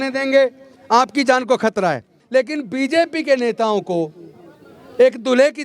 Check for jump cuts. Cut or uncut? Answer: cut